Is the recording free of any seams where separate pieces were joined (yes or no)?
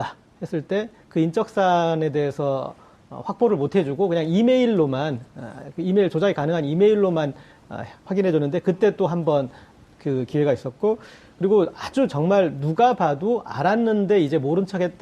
yes